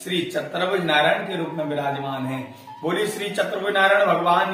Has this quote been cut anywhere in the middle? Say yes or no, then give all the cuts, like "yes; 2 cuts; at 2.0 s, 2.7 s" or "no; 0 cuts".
no; 0 cuts